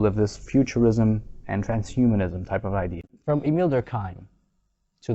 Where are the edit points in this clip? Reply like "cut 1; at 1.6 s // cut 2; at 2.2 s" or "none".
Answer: cut 1; at 3.0 s